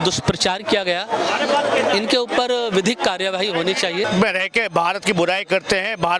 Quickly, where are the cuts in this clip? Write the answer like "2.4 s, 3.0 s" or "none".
4.1 s